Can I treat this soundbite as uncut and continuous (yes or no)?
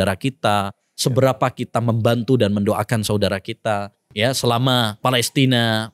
no